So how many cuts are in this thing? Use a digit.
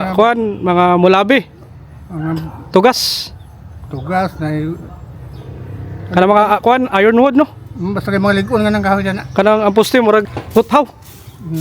1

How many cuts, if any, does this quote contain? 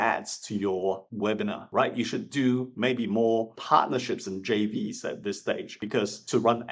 1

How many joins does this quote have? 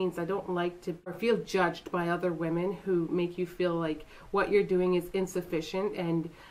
1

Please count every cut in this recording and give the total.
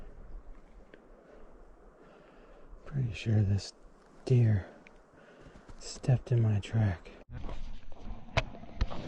1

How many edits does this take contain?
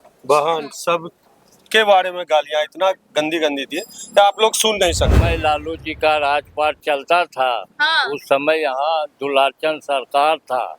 1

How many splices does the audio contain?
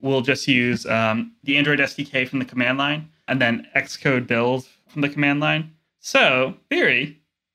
3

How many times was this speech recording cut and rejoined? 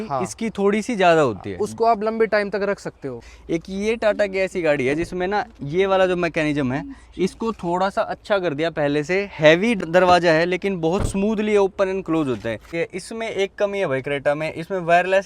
3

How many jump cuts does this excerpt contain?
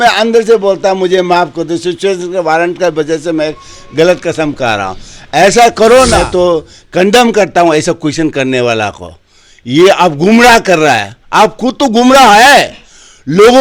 1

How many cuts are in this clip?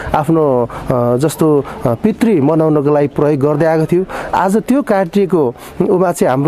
0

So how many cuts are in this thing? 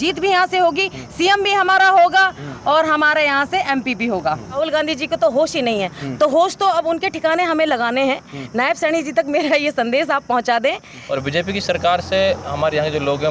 2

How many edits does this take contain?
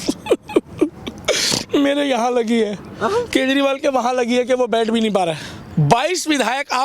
1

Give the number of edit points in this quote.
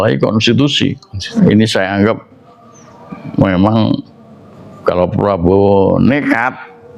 0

